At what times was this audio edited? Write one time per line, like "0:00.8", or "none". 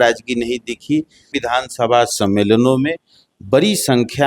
0:01.4

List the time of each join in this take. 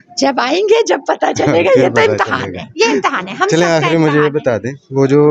none

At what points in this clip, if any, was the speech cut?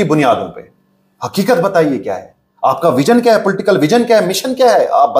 none

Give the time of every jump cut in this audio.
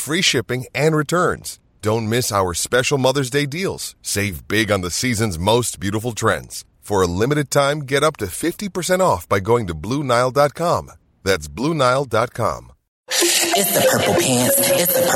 0:13.4

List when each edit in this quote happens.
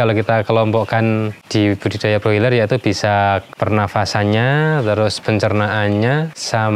none

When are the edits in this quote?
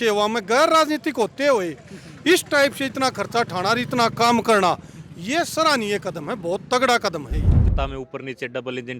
0:07.6

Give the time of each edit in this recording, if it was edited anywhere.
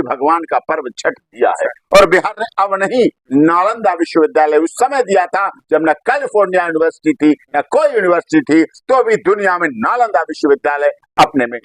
none

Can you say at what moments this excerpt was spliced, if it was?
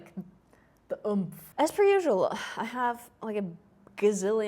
0:01.4

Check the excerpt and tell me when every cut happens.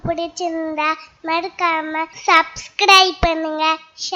0:02.1

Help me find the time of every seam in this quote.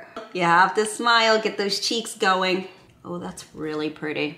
none

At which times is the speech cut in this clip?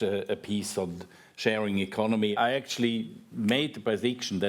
0:02.3

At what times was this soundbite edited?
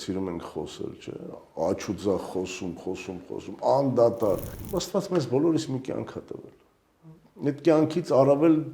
0:04.6

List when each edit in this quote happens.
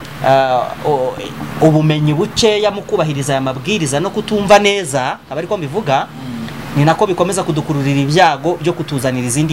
none

